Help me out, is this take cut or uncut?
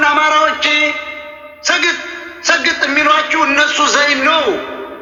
uncut